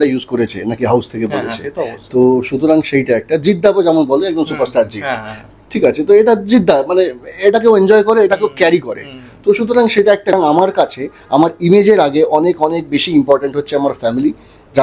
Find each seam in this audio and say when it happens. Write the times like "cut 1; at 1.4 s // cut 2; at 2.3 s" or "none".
cut 1; at 10.3 s